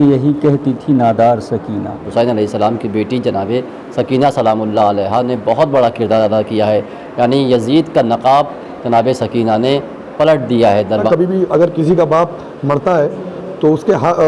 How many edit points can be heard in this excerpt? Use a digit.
2